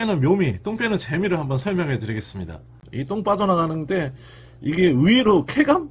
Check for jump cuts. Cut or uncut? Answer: cut